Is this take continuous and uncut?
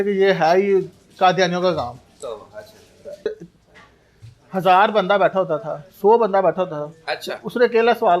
no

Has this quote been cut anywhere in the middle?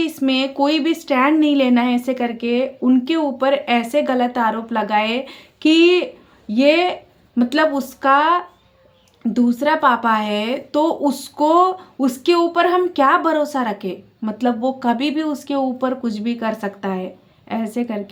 no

